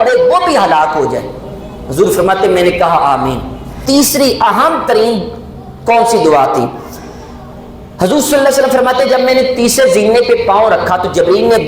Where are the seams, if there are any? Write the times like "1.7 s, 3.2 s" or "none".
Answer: 3.8 s